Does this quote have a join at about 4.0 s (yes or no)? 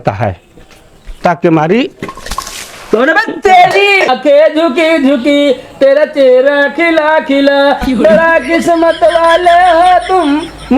yes